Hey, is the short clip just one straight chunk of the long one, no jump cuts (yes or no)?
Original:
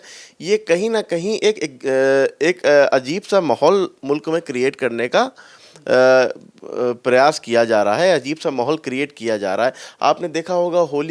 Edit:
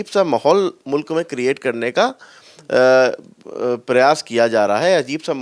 yes